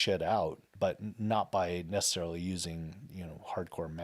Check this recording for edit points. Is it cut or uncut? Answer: uncut